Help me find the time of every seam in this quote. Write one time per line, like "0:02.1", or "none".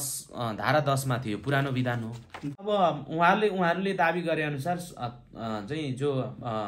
0:02.6